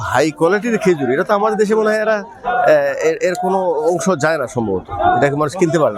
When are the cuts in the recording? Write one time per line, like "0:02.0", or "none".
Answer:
none